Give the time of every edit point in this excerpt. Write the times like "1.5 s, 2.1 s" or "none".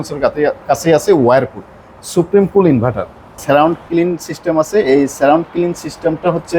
3.4 s